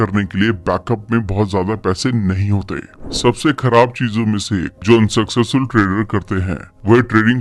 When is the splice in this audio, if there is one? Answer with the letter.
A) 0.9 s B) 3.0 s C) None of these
B